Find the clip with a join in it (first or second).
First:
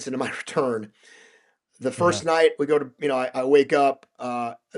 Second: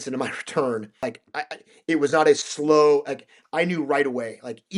second